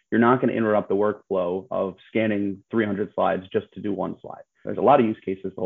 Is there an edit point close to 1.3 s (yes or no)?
no